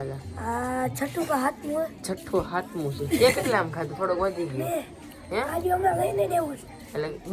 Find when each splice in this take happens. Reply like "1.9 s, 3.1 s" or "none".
none

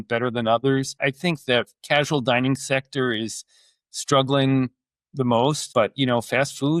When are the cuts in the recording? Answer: 1.0 s, 5.6 s

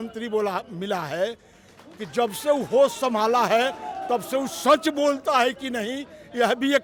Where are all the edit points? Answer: none

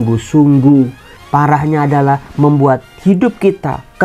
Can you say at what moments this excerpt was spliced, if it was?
1.1 s

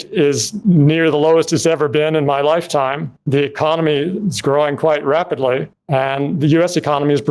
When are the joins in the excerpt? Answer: none

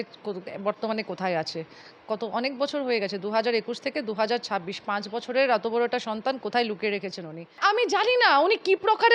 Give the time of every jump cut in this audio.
7.6 s

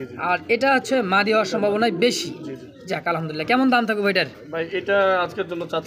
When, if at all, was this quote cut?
none

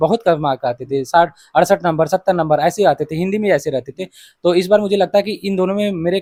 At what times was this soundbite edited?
none

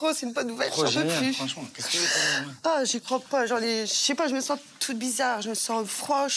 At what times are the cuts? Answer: 2.1 s

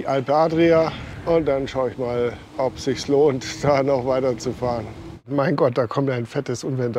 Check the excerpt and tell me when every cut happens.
1.1 s, 2.4 s, 5.3 s

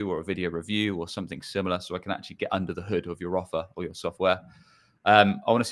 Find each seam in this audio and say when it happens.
none

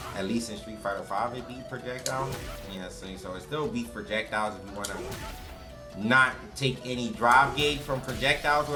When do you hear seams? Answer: none

